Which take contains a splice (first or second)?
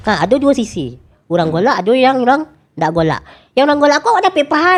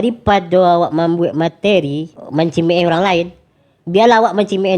second